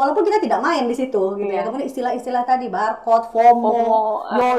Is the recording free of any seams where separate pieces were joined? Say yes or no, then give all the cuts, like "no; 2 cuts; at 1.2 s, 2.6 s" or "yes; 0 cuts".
yes; 0 cuts